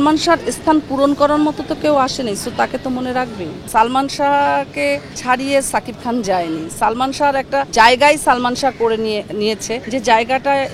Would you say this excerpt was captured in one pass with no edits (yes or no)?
no